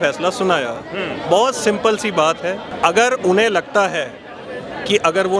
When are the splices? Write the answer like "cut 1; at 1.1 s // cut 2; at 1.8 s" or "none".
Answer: cut 1; at 2.7 s